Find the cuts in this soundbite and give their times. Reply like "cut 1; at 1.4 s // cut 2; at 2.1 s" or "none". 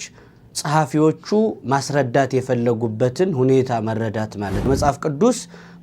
cut 1; at 4.6 s